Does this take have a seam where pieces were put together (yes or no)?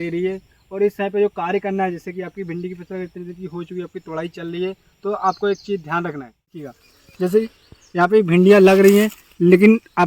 yes